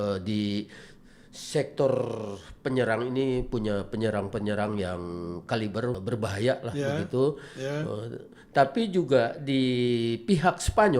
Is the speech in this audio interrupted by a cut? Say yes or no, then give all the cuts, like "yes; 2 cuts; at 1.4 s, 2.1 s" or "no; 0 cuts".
yes; 1 cut; at 6.0 s